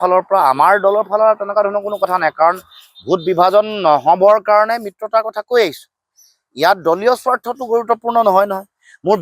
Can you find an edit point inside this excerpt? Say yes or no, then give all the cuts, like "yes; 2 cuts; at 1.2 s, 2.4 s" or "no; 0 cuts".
no; 0 cuts